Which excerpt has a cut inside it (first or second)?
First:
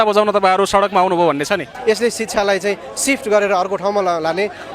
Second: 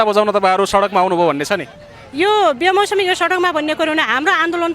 first